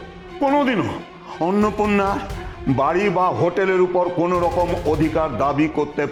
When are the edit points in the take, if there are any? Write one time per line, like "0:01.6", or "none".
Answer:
none